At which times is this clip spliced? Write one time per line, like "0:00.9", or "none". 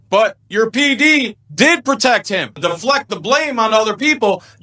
0:02.6